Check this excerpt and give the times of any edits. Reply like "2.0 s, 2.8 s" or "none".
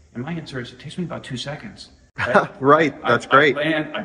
none